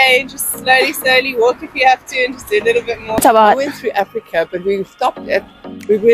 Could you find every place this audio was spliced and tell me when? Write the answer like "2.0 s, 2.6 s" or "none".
3.2 s